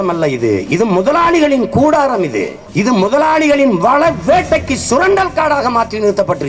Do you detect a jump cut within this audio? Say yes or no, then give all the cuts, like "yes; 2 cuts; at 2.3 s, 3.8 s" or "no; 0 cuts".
no; 0 cuts